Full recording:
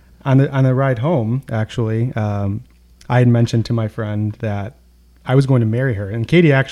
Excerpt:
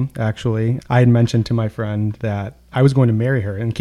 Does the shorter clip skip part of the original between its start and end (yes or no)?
yes